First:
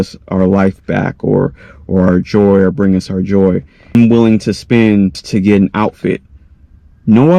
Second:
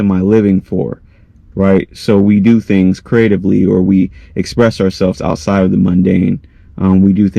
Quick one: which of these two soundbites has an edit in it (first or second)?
first